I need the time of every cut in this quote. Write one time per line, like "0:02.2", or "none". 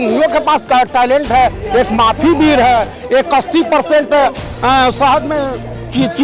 none